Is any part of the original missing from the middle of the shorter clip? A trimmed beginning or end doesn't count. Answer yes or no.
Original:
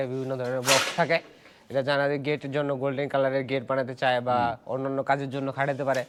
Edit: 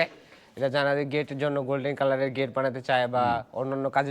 no